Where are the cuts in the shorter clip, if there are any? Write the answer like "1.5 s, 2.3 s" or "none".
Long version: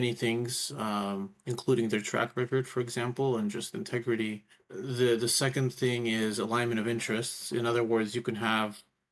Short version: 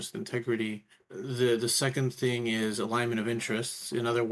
none